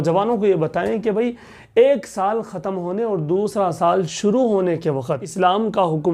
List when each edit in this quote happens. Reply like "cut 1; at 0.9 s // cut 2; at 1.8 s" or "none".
cut 1; at 5.0 s